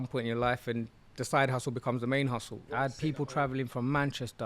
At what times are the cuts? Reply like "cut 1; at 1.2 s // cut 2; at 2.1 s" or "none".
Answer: cut 1; at 2.9 s